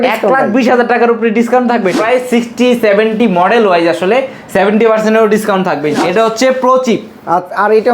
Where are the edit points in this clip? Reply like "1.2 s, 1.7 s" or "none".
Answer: 2.0 s, 6.0 s